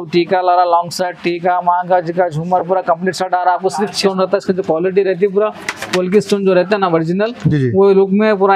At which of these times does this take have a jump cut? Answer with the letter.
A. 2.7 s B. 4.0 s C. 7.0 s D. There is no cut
B